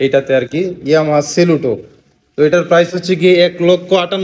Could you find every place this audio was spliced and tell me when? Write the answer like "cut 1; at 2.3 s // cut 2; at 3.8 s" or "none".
none